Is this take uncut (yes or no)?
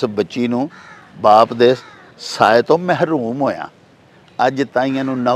yes